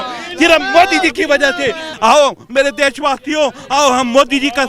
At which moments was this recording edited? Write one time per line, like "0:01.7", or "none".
0:01.9